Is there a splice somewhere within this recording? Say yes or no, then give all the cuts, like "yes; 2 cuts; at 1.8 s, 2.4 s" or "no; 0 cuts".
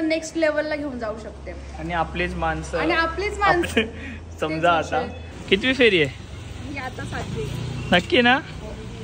yes; 2 cuts; at 3.7 s, 5.3 s